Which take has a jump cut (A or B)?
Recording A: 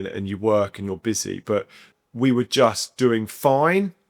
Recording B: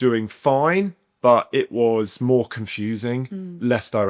A